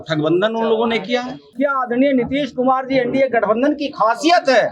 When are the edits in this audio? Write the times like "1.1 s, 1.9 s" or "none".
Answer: 1.5 s